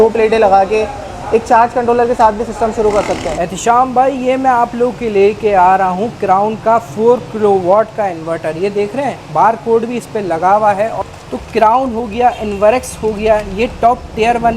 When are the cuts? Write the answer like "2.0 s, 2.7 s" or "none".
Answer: 3.3 s, 11.0 s